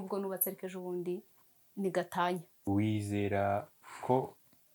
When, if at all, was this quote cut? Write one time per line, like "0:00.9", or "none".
0:02.7